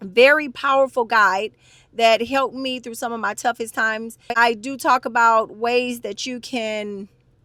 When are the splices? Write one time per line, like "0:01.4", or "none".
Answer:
none